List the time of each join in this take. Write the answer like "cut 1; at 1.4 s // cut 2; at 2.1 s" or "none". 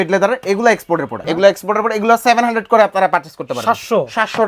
cut 1; at 1.2 s